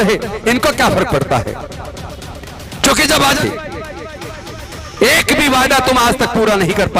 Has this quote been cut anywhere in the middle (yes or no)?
yes